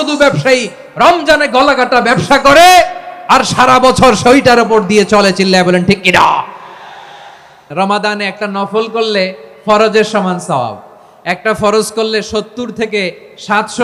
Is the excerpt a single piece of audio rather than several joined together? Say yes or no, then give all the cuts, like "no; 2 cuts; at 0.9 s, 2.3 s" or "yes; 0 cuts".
no; 1 cut; at 7.7 s